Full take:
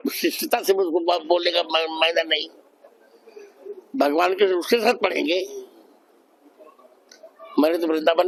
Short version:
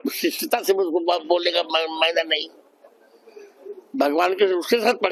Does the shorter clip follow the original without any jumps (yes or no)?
yes